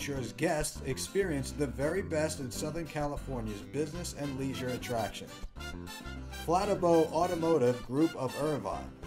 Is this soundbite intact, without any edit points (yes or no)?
yes